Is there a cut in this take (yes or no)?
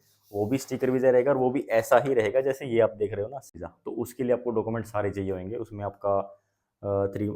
yes